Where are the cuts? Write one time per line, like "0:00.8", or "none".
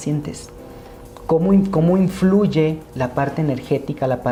none